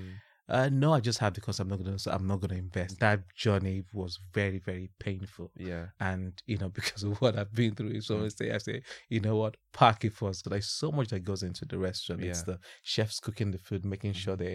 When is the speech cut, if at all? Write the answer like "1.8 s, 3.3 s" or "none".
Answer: 2.9 s, 10.4 s